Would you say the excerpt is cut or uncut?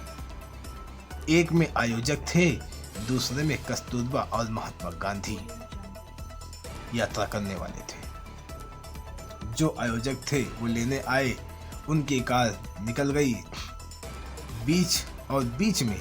cut